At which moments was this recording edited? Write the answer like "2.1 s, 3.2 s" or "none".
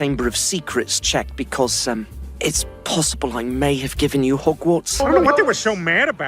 5.1 s